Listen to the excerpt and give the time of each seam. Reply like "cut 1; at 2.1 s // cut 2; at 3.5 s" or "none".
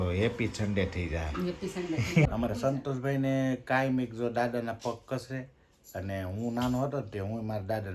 cut 1; at 2.3 s